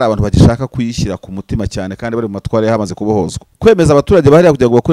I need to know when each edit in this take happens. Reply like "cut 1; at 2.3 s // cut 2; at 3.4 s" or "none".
cut 1; at 3.4 s